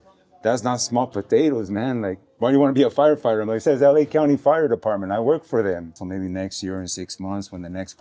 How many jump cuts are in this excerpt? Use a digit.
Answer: 1